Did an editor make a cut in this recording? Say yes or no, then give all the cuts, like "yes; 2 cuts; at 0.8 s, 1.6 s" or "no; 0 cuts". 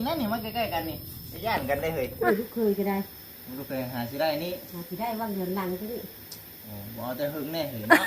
yes; 1 cut; at 2.3 s